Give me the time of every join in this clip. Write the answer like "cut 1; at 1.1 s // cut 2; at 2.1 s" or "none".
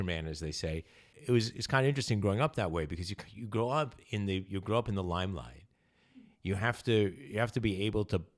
cut 1; at 1.1 s